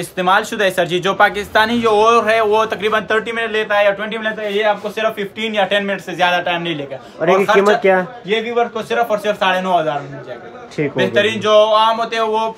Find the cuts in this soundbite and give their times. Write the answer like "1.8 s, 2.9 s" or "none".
none